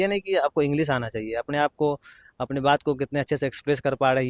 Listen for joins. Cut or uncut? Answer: uncut